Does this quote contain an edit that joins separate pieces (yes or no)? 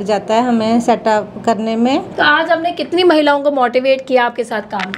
yes